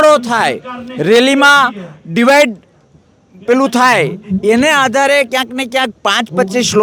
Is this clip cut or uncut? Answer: uncut